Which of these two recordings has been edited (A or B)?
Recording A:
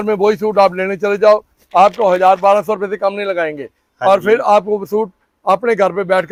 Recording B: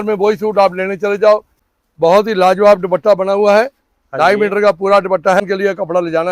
B